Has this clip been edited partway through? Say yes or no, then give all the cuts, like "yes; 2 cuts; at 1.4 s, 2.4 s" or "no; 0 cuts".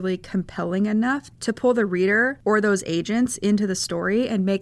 yes; 1 cut; at 1.3 s